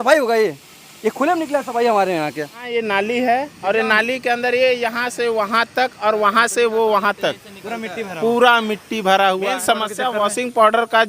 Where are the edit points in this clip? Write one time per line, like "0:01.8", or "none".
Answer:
0:02.6
0:09.6

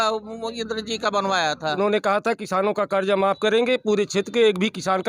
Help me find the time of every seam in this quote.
0:01.8

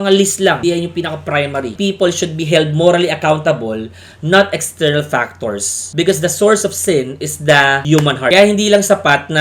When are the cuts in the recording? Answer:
0:01.7
0:08.3

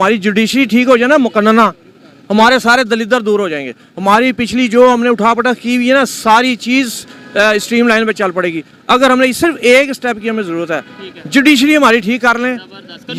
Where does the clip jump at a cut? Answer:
none

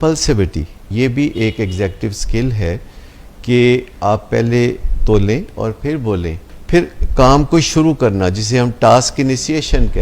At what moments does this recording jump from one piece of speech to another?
0:00.8
0:06.6

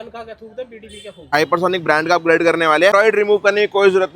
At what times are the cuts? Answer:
0:01.2
0:02.9

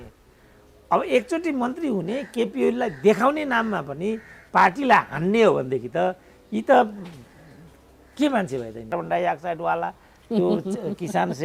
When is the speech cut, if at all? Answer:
0:08.9

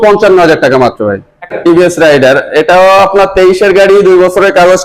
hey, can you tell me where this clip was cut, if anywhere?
0:01.0

